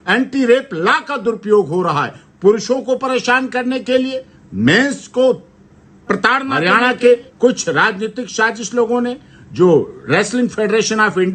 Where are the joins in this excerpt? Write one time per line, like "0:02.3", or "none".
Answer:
0:06.5